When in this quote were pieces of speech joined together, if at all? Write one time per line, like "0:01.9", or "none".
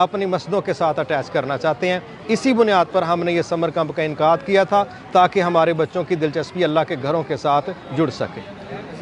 none